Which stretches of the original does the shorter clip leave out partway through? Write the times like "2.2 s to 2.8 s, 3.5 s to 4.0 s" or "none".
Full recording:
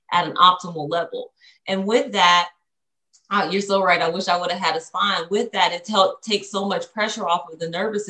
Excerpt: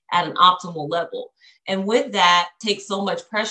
2.6 s to 6.2 s